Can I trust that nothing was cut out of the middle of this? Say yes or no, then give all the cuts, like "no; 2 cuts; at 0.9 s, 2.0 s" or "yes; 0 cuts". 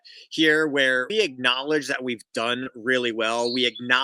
no; 1 cut; at 1.1 s